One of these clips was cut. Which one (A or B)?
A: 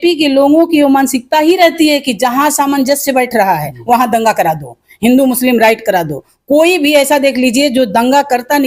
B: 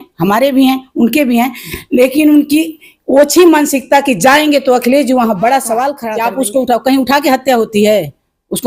B